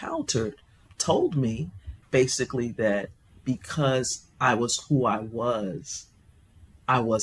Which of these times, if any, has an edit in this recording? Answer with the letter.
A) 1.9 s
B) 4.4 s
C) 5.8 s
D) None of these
A